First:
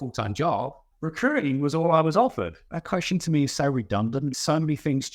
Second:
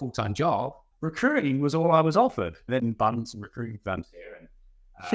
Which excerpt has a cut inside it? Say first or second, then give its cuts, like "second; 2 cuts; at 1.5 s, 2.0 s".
first; 2 cuts; at 2.6 s, 4.3 s